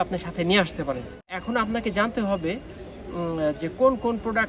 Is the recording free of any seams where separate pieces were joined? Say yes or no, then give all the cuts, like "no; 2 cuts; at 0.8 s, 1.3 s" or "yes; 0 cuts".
no; 1 cut; at 1.4 s